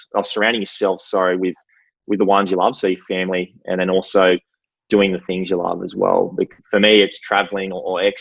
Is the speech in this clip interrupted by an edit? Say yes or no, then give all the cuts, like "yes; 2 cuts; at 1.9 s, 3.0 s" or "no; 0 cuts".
yes; 1 cut; at 6.6 s